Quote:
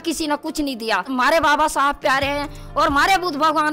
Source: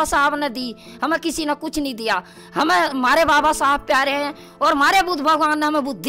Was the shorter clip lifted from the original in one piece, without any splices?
no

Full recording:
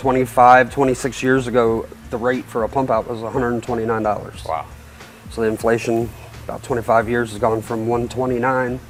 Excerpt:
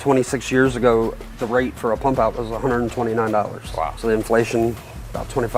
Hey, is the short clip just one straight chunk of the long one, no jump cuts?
no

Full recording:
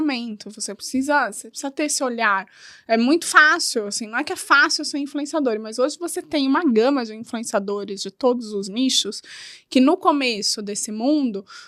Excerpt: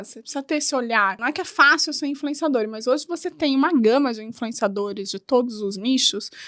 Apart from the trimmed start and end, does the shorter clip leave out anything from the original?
yes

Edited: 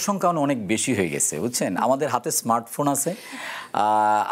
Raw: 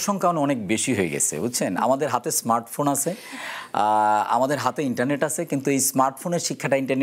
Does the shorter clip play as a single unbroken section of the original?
yes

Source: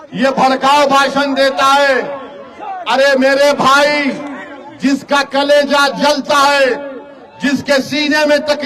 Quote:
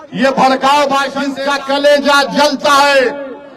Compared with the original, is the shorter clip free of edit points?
no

